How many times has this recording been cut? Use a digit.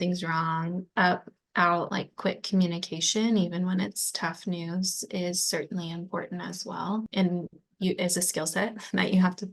2